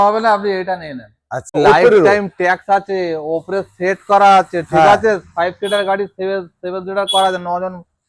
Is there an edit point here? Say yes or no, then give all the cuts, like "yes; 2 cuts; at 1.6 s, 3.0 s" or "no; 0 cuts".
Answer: yes; 1 cut; at 1.6 s